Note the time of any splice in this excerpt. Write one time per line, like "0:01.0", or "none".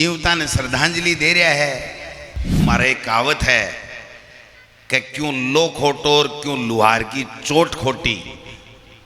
0:02.6